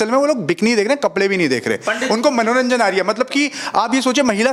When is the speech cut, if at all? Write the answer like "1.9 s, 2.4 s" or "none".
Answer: none